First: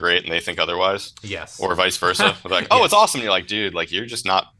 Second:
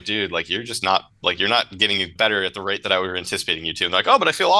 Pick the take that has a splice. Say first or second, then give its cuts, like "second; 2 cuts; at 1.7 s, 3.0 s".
second; 1 cut; at 2.1 s